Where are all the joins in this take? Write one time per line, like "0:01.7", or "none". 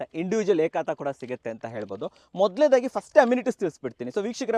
none